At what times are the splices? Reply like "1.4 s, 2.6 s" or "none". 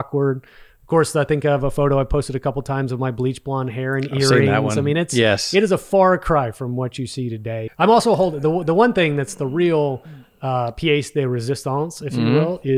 7.7 s

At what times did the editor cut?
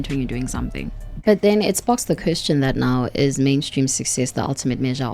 1.1 s

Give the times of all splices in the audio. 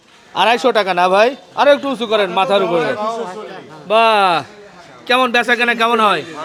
none

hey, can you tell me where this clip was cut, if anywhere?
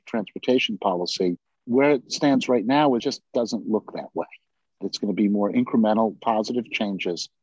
1.5 s, 4.8 s

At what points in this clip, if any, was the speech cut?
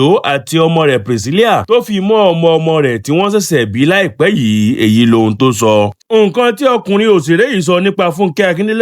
6.0 s

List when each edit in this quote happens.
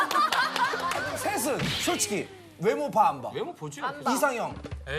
0.9 s

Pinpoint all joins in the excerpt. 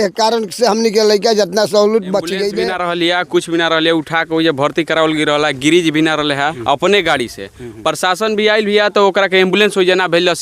2.6 s, 6.6 s

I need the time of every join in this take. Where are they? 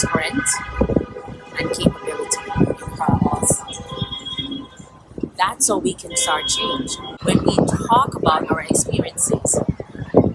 7.2 s

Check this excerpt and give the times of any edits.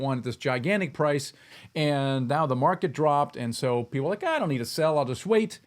none

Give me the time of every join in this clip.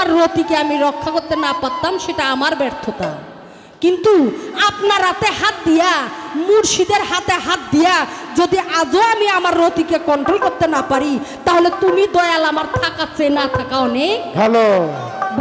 none

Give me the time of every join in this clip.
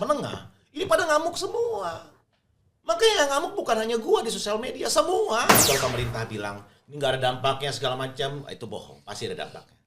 5.6 s

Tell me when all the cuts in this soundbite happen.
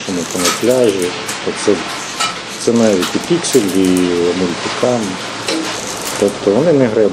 none

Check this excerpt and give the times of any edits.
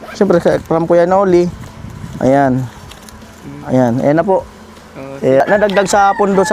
5.4 s

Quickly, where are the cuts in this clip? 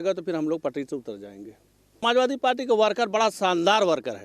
2.0 s

